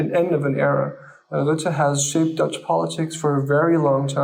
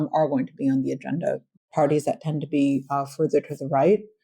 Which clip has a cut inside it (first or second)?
second